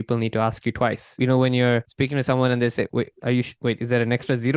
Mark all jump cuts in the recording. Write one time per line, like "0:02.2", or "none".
0:01.2
0:01.9
0:03.5